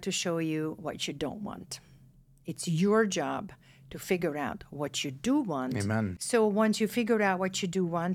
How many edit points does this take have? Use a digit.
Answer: 1